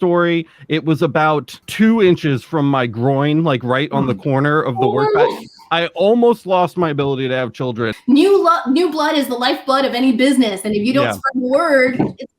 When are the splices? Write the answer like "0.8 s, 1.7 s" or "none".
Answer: 7.9 s